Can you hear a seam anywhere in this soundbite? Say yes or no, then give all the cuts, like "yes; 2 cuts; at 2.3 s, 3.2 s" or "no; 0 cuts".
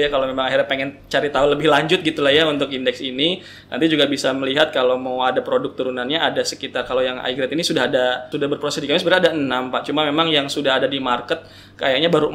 yes; 1 cut; at 8.3 s